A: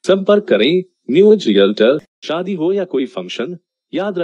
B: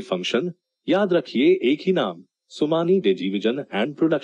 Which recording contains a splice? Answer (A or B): A